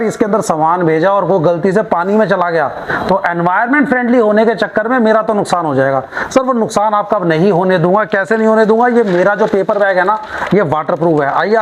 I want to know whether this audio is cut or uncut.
uncut